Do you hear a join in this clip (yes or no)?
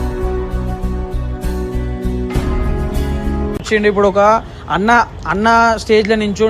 no